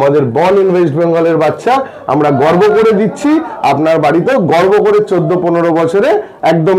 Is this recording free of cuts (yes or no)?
yes